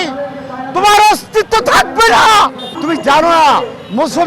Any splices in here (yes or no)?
yes